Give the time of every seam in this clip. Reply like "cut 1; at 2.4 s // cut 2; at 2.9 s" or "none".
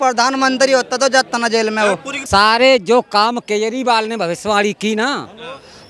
cut 1; at 2.1 s